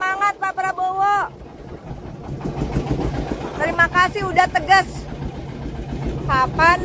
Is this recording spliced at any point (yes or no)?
yes